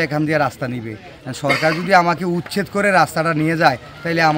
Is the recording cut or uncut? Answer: uncut